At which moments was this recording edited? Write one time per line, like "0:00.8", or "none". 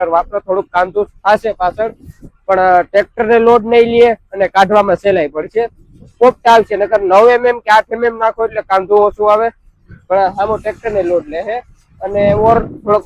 none

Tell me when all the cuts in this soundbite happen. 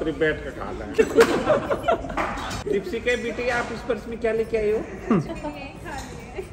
0:01.0
0:02.5

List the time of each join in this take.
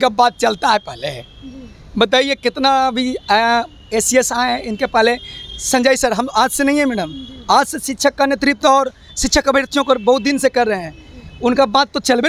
none

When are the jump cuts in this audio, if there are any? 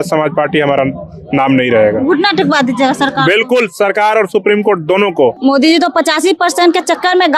0:05.4

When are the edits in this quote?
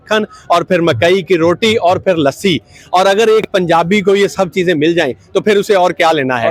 none

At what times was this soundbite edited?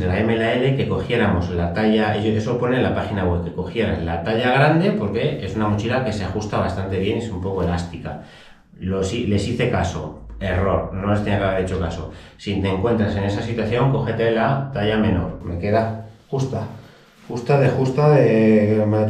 0:15.5

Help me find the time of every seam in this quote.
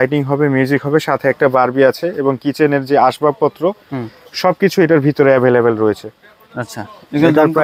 none

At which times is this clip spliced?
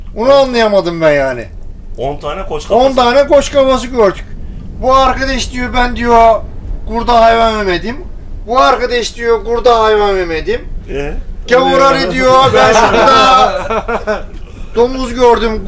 none

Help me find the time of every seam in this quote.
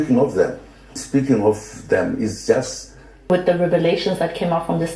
0:03.3

